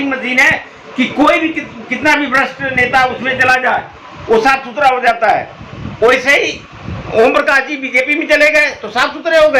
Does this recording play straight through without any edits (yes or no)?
yes